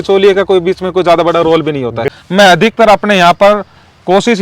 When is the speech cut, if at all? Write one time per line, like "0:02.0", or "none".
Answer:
0:02.2